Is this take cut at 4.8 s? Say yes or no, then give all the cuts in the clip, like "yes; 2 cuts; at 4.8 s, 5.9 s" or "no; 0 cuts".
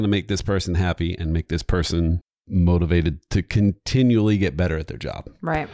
no; 1 cut; at 2.3 s